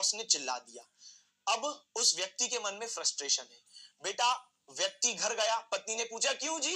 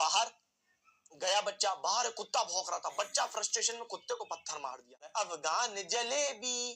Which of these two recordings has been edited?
second; 1 cut; at 5.1 s

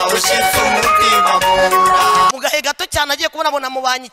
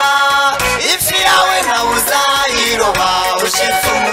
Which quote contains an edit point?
first; 1 cut; at 2.3 s

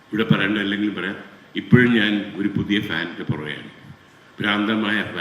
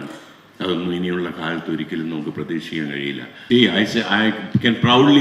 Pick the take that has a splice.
second; 1 cut; at 3.4 s

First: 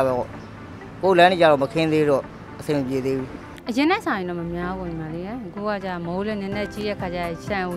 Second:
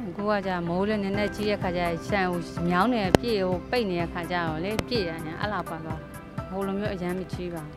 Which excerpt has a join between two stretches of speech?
first; 1 cut; at 3.5 s

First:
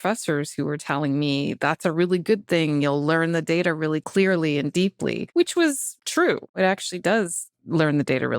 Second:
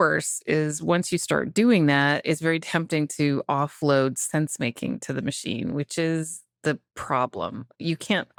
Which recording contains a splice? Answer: first; 3 cuts; at 4.0 s, 5.2 s, 6.4 s

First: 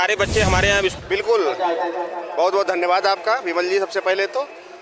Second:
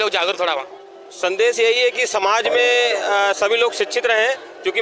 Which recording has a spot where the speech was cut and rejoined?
first; 1 cut; at 0.9 s

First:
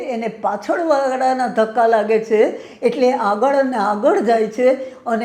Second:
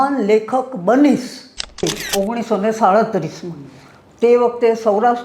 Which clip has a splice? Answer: second; 1 cut; at 1.8 s

